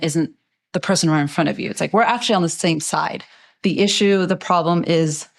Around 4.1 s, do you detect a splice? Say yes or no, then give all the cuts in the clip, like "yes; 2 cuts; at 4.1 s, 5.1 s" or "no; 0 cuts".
no; 0 cuts